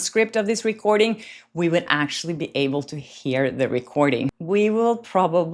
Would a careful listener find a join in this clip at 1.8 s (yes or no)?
no